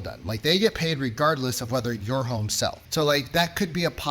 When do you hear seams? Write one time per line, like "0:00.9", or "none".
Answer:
0:02.8